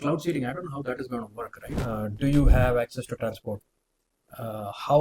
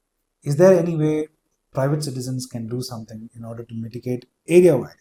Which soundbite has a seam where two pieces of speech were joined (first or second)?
first